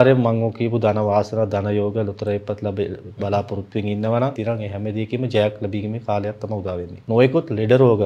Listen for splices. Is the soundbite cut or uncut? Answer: cut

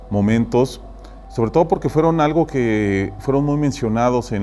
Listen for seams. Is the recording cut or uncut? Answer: cut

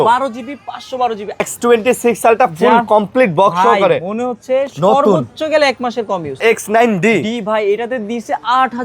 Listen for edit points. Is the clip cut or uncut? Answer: cut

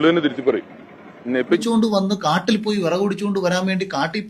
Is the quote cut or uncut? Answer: cut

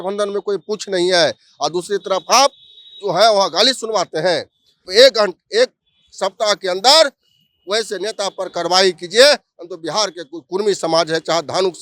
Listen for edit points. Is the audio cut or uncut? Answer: cut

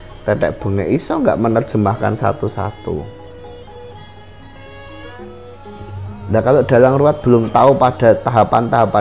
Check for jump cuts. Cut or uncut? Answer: cut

